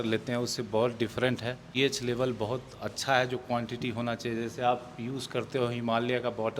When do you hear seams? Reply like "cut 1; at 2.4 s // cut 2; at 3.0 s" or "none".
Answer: cut 1; at 1.7 s